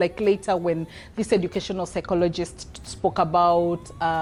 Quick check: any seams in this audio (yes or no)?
no